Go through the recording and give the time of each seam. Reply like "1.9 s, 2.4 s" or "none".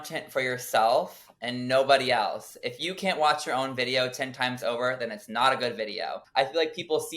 6.2 s